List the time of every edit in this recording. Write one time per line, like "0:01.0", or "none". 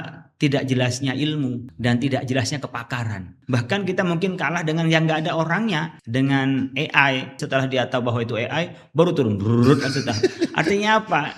0:01.7
0:03.3
0:06.0
0:07.4